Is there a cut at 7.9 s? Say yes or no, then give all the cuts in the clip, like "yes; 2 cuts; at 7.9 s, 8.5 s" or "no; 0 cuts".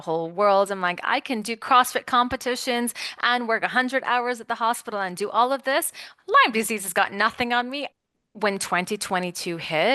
yes; 1 cut; at 7.9 s